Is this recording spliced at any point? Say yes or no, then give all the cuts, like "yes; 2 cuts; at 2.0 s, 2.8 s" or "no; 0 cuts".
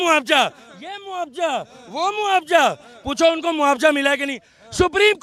no; 0 cuts